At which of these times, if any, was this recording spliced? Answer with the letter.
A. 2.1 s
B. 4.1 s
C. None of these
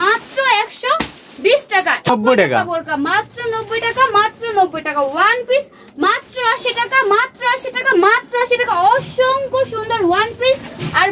A